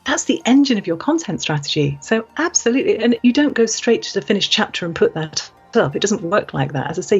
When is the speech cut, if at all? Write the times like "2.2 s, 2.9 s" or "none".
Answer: 3.2 s